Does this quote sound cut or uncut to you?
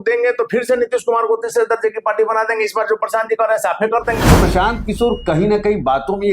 cut